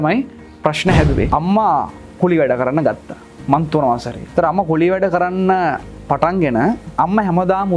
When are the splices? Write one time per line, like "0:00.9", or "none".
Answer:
0:01.3